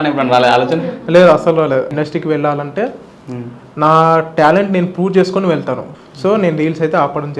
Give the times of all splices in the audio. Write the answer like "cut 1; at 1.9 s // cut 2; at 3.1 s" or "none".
cut 1; at 1.9 s // cut 2; at 5.9 s